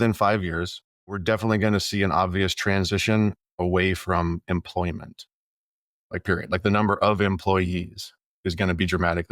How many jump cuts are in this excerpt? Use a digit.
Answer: 1